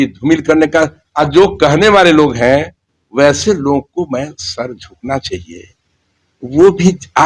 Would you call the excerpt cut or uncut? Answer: cut